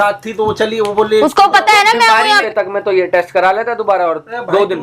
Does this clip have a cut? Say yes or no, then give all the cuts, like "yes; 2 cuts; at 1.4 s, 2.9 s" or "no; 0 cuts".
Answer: yes; 1 cut; at 2.4 s